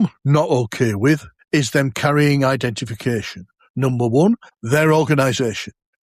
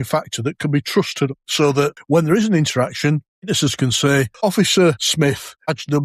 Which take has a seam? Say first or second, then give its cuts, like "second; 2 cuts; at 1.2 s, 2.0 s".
second; 3 cuts; at 1.9 s, 4.3 s, 5.1 s